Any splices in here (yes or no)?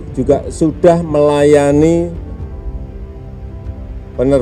yes